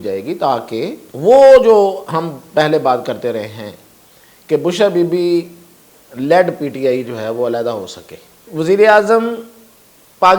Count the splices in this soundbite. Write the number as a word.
two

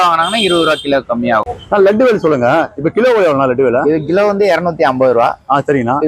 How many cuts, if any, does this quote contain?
one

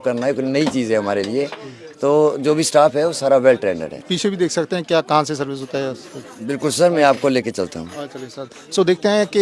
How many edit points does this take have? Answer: one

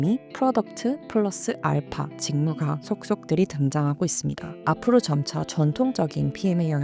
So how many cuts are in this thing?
one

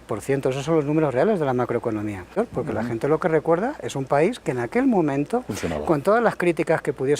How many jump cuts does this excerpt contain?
one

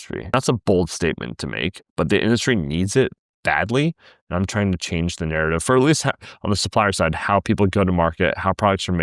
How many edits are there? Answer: zero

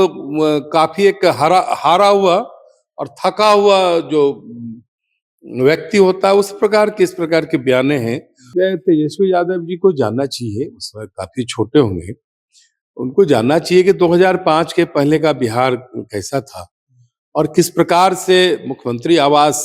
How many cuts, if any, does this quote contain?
one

